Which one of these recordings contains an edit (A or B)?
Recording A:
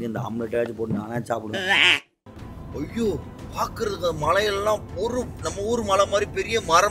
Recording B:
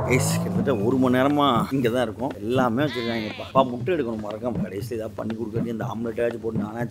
A